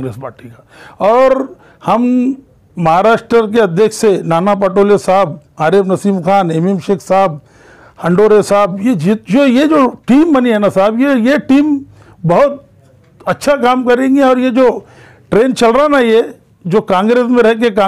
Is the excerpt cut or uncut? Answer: uncut